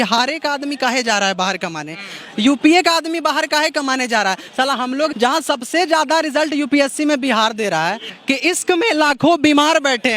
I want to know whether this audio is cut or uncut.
cut